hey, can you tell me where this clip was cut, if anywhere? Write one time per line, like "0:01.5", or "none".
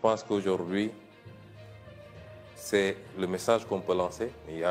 none